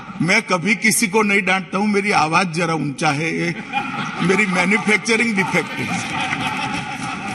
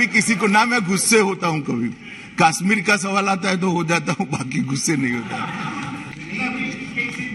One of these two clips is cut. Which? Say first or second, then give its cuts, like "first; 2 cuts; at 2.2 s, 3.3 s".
second; 1 cut; at 6.1 s